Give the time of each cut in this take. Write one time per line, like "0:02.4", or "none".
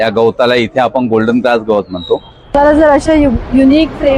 0:02.5